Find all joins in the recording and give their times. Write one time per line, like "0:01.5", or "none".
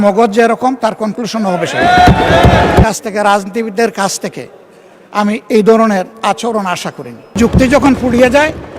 0:02.8
0:07.4